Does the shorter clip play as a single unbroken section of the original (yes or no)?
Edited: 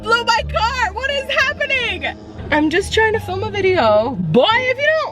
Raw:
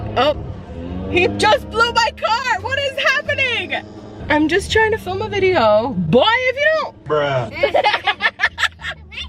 no